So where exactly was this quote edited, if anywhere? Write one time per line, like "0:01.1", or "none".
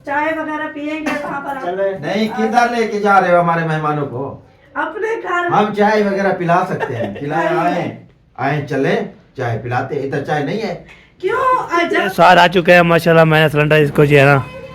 0:01.6
0:07.4
0:11.8